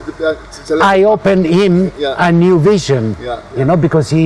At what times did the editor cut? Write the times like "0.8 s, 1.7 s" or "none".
none